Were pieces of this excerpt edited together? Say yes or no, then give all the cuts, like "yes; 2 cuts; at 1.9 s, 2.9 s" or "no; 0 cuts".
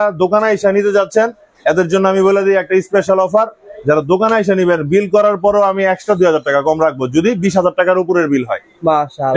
no; 0 cuts